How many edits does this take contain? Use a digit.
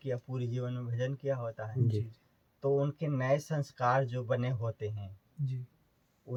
0